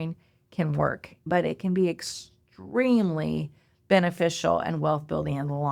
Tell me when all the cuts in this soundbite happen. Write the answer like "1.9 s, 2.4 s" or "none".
1.2 s